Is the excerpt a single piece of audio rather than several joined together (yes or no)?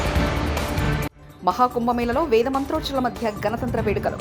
yes